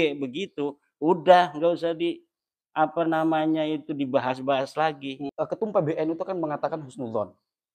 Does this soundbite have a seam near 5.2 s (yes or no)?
yes